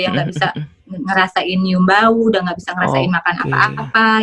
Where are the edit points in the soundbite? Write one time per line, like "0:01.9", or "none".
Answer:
none